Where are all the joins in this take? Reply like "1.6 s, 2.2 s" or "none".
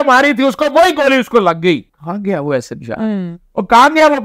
1.9 s